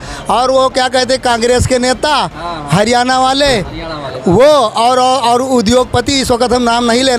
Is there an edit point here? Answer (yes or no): no